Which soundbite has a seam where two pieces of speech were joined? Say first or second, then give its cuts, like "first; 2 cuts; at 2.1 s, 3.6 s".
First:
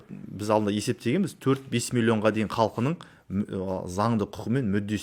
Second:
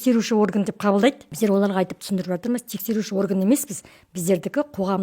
second; 1 cut; at 1.3 s